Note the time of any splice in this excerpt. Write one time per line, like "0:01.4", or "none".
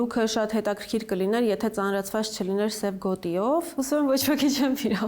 0:03.7